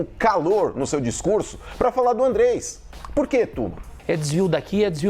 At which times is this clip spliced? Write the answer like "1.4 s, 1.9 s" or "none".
4.0 s